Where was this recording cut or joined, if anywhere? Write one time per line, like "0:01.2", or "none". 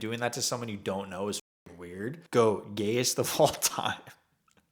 0:02.2